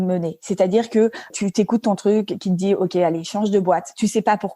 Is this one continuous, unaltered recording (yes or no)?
no